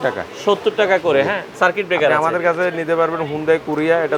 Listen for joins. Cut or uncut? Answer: cut